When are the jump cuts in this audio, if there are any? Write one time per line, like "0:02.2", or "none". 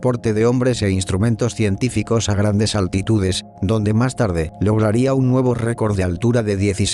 none